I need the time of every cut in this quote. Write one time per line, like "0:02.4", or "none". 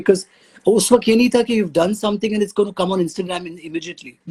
none